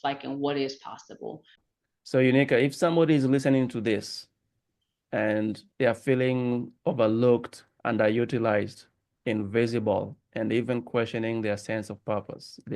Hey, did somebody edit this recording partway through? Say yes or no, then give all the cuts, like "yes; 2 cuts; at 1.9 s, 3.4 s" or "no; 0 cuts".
yes; 1 cut; at 1.6 s